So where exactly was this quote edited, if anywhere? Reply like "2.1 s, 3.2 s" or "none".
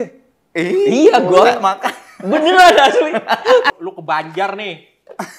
3.7 s